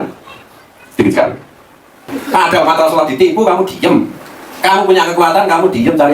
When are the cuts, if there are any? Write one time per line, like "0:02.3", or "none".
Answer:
0:02.0